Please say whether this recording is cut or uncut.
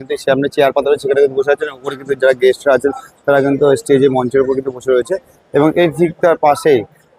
uncut